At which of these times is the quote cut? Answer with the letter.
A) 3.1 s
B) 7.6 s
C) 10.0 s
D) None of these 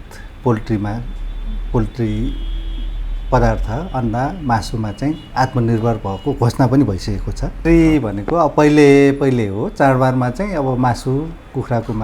B